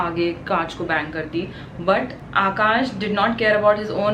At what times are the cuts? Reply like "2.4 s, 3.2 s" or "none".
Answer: none